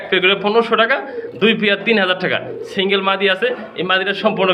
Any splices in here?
no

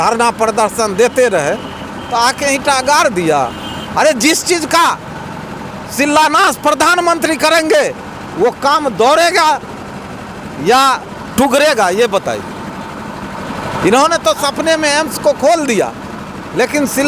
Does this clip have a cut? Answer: no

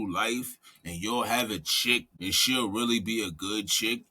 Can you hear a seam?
yes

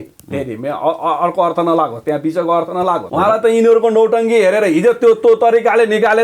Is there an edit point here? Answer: yes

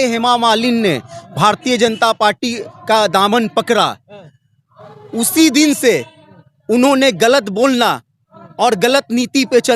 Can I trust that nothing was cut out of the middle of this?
yes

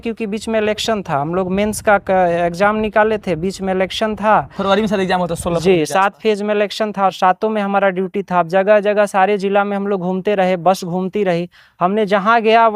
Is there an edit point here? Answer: no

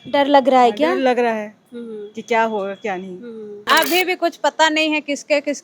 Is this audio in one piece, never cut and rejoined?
no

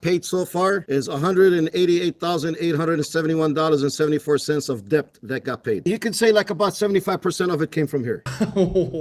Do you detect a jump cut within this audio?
no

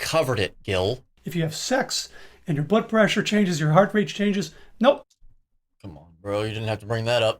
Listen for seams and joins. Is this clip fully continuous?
no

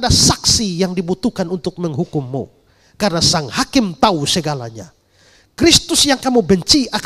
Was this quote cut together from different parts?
no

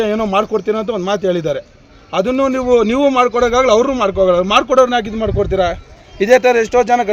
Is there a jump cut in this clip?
no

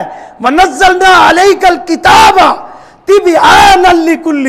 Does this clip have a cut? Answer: no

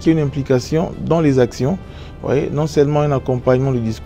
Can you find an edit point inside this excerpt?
no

